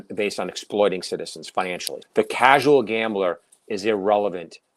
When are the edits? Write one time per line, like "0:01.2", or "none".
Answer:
0:02.0